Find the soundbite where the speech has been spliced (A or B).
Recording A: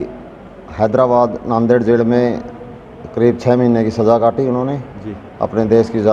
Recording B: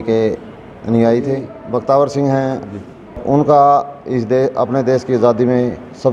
B